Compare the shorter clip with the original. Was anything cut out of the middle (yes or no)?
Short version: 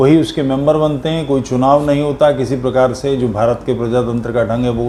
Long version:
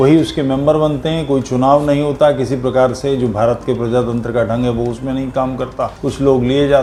no